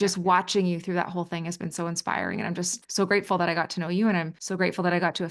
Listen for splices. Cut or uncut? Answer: cut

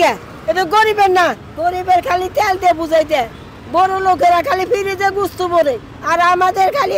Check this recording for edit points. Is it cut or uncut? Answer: cut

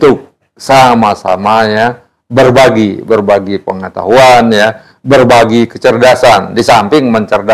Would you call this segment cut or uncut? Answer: uncut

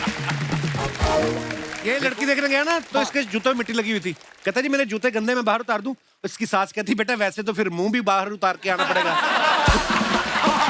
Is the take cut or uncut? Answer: cut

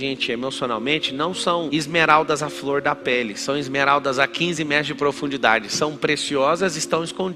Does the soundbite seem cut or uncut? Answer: uncut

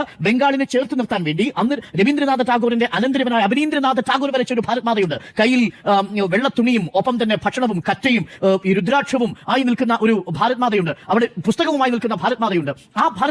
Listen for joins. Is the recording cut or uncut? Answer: uncut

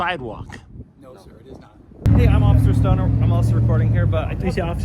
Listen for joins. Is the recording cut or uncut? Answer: cut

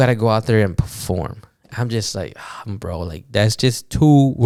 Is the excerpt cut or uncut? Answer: uncut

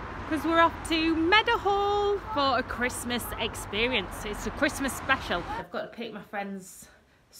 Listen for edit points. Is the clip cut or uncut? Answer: cut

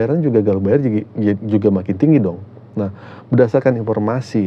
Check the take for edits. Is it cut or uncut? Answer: uncut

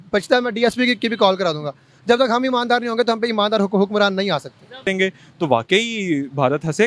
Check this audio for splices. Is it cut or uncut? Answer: cut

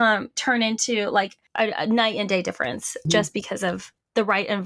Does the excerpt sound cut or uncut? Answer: cut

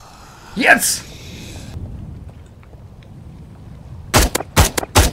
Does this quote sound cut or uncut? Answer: cut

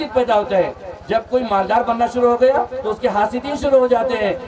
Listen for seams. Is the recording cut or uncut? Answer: uncut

